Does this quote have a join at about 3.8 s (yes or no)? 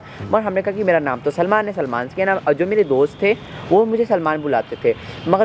no